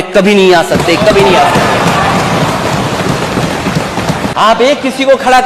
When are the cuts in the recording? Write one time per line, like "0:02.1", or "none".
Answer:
0:04.3